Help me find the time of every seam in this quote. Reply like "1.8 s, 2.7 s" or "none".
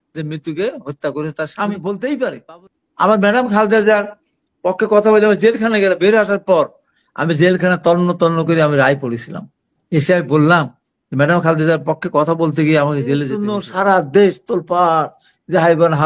1.8 s, 13.5 s

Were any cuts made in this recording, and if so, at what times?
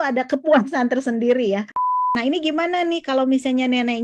1.7 s

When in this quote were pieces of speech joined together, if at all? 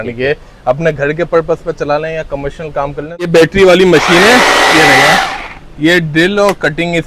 3.3 s

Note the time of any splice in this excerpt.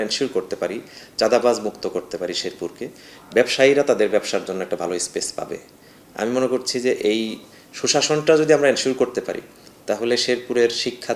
none

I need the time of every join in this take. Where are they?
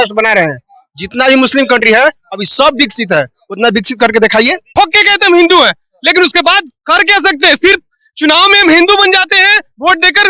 4.6 s

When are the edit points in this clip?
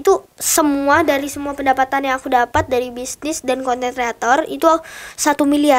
none

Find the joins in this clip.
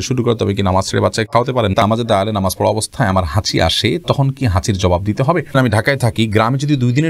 1.8 s, 5.5 s

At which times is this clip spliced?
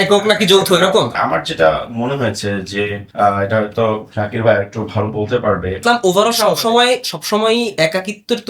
1.1 s, 3.0 s, 5.8 s

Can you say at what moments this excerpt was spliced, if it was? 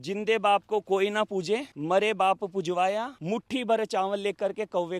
none

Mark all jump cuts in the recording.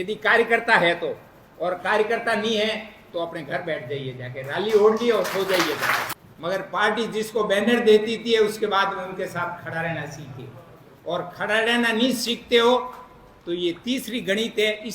6.1 s

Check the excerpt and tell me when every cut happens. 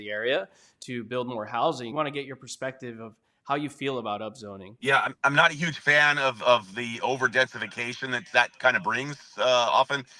1.9 s

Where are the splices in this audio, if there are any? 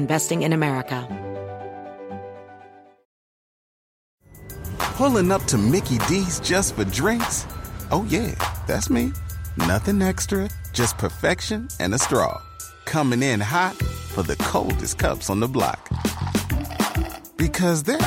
1.0 s

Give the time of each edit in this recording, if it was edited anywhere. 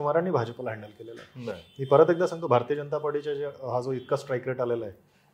none

